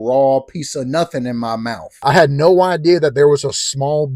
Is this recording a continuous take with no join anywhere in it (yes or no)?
no